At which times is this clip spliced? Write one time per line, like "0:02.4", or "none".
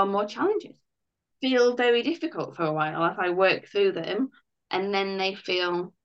0:01.3